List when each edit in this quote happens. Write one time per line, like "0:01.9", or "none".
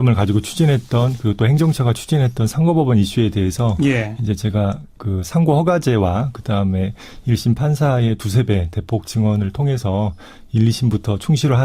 0:08.8